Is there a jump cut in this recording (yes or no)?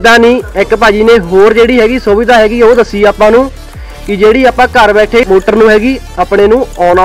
no